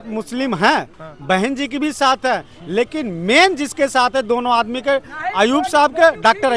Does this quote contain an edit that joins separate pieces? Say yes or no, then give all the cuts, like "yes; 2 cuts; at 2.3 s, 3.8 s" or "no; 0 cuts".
no; 0 cuts